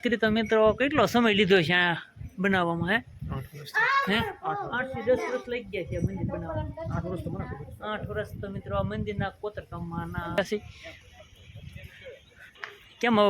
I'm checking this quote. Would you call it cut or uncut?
cut